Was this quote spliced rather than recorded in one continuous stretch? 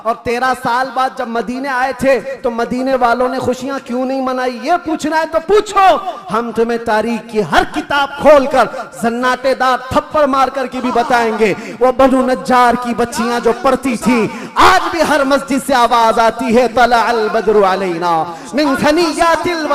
no; 0 cuts

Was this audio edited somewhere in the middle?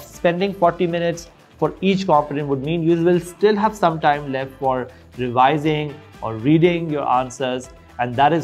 no; 0 cuts

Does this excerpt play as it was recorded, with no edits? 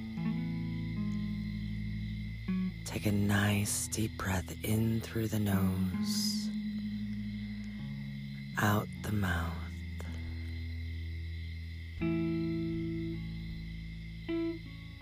yes; 0 cuts

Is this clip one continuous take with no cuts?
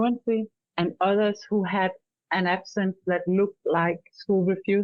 yes; 0 cuts

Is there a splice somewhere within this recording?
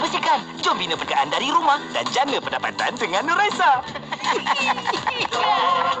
yes; 1 cut; at 1.0 s

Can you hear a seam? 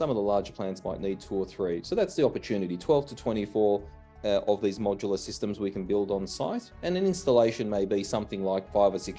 no; 0 cuts

